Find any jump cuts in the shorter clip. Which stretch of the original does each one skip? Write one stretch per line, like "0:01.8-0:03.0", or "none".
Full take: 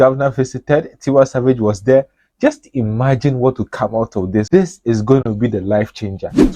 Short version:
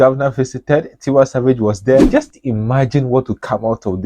0:02.1-0:02.4